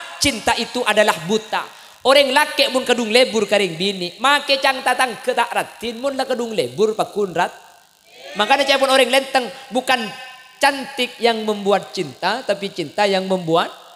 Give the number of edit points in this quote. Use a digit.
0